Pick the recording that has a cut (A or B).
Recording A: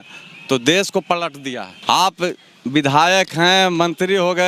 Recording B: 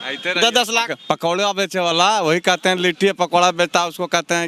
A